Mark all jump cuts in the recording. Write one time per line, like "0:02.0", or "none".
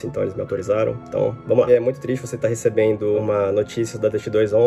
0:01.7
0:03.2